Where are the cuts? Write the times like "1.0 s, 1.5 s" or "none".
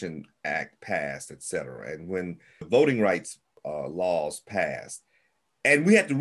2.7 s, 3.6 s